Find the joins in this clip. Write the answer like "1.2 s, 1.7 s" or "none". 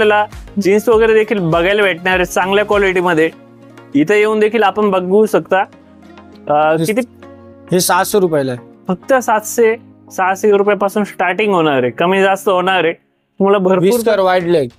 none

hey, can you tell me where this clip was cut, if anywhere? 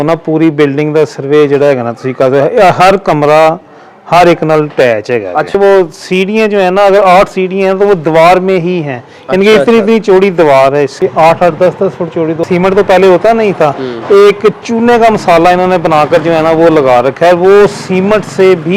5.5 s, 10.9 s, 12.4 s

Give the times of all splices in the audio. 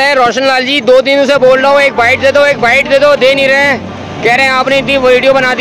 none

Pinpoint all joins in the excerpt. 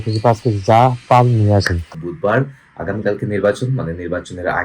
2.0 s

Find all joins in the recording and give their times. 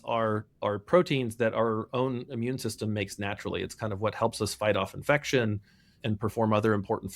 6.0 s

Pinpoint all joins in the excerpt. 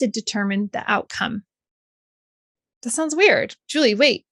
none

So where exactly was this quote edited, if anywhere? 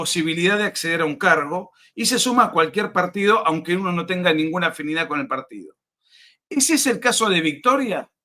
none

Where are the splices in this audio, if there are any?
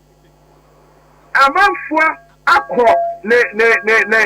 3.2 s

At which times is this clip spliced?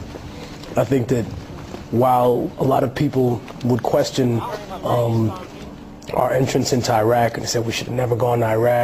3.5 s

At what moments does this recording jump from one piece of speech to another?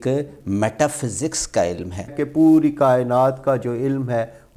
2.2 s

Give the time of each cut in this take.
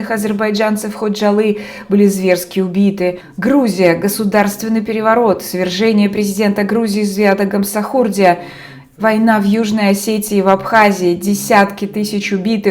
3.3 s

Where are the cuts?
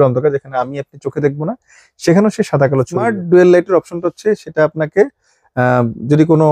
3.0 s

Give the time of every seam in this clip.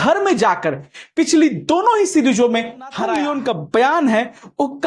3.1 s

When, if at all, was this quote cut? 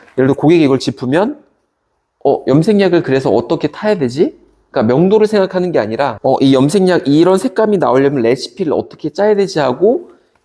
6.2 s

